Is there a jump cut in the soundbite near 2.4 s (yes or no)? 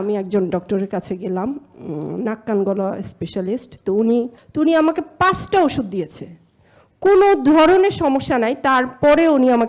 no